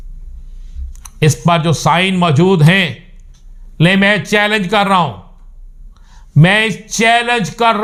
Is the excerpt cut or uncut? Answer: uncut